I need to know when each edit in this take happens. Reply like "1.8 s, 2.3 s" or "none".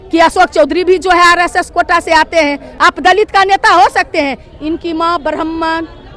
2.7 s